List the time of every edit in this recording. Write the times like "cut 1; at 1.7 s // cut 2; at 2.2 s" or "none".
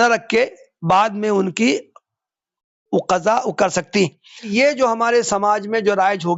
cut 1; at 4.5 s